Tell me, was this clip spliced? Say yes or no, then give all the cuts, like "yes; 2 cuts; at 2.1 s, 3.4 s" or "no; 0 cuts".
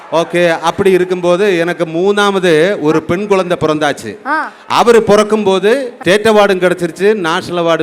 yes; 1 cut; at 6.0 s